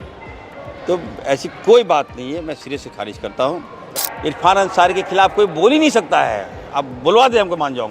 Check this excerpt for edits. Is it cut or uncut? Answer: cut